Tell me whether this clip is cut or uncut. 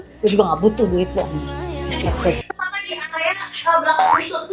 uncut